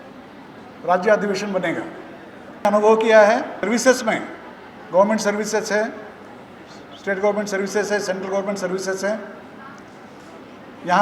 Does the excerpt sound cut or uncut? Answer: cut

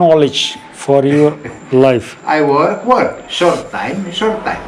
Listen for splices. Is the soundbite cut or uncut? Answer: uncut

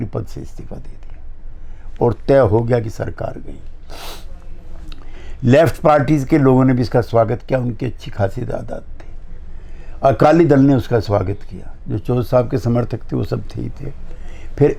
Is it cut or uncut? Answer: uncut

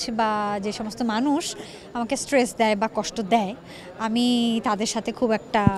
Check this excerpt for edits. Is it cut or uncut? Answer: uncut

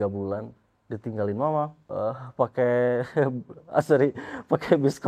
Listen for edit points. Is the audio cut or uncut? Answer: cut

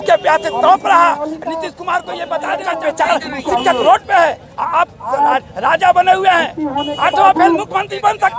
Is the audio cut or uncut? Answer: cut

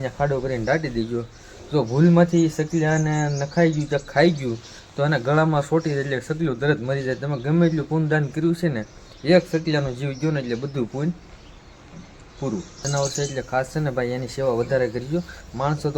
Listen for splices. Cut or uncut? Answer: cut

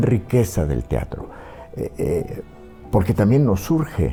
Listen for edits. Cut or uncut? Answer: uncut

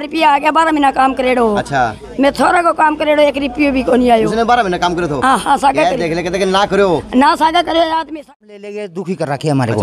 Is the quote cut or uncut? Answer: cut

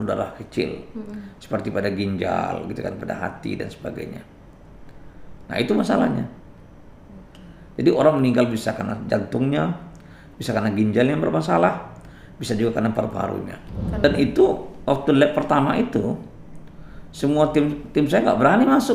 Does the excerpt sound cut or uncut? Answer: cut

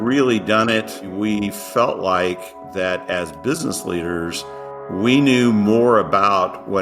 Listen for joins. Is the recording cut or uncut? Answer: cut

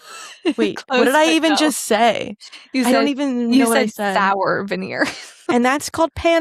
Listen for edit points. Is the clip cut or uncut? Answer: cut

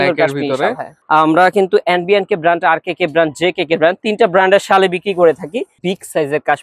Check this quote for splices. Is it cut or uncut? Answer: cut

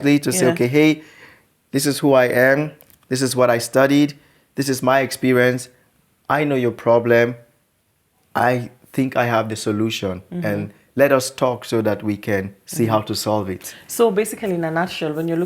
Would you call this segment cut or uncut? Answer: uncut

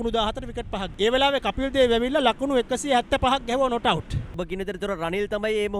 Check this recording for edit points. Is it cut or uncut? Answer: cut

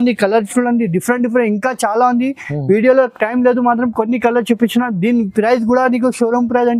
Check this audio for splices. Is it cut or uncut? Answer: uncut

